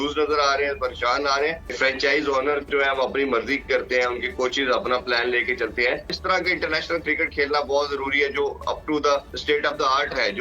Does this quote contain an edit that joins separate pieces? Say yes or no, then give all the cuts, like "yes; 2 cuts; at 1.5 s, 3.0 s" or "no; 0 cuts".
yes; 3 cuts; at 1.7 s, 6.1 s, 9.3 s